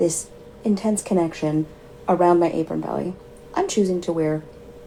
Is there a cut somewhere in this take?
no; 0 cuts

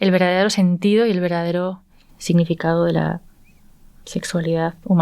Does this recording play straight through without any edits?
no; 1 cut; at 2.1 s

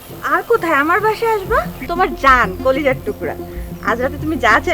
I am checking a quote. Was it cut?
yes; 1 cut; at 1.8 s

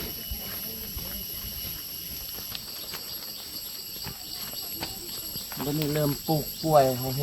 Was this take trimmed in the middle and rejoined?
yes; 1 cut; at 2.5 s

